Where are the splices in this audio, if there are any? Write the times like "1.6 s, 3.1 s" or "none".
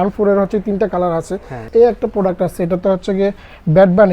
1.6 s

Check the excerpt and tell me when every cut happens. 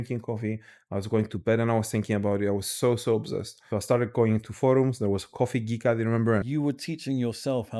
3.5 s, 6.4 s

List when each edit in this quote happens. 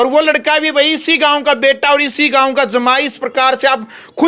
none

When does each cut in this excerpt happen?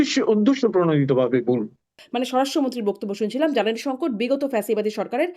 2.0 s

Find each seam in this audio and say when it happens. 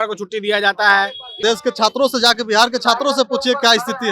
1.4 s

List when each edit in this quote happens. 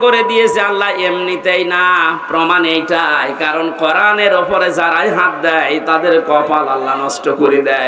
none

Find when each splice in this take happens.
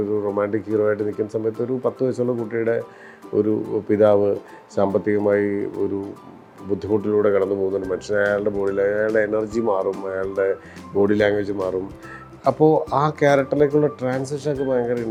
none

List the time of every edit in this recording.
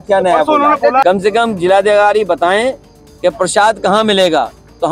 1.0 s

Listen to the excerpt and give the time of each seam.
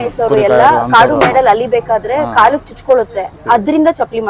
3.4 s

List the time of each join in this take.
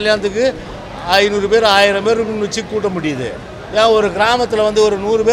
none

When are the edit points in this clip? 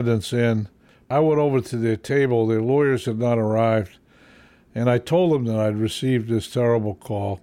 1.1 s

